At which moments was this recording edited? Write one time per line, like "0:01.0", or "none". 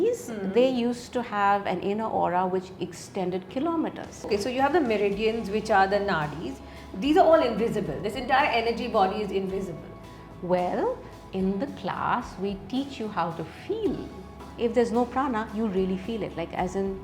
0:04.1
0:14.4

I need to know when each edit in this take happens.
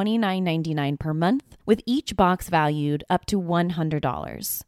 0:01.5

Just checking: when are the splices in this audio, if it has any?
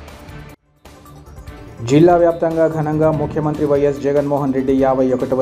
0:01.5

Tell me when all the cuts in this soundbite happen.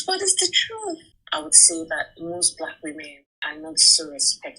0:01.1

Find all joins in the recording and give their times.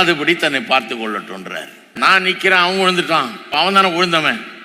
0:02.0
0:03.5

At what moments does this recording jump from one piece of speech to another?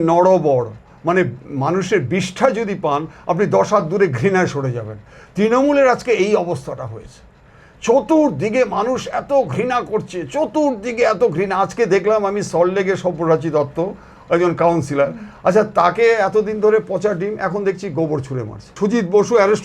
0:18.7

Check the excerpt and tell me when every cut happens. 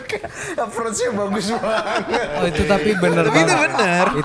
none

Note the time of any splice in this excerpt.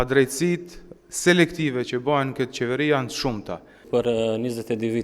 0:03.8

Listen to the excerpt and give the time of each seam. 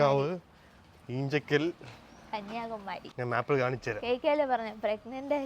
0:03.1

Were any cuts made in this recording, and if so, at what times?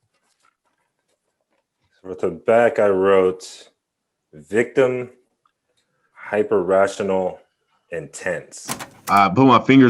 0:08.9

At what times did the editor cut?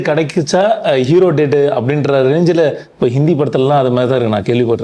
none

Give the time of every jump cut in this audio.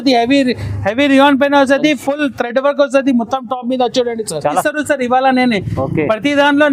0:04.5

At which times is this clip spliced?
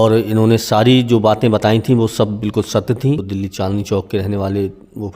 0:03.3

